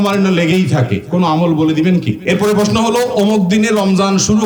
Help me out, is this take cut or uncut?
cut